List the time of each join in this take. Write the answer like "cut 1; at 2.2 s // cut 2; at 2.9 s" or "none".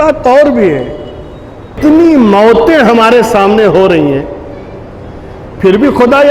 cut 1; at 1.8 s